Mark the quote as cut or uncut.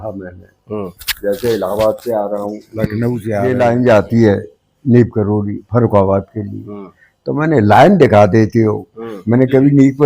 cut